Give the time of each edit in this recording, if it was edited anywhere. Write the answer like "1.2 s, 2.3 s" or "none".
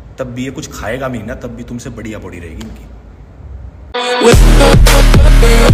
4.0 s